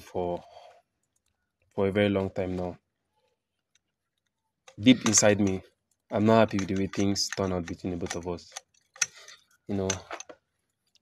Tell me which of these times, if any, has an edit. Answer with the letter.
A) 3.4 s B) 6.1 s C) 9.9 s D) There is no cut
D